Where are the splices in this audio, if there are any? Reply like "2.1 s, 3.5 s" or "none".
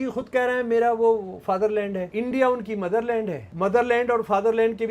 2.1 s, 3.4 s